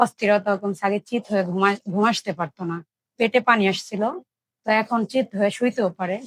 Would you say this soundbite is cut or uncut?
uncut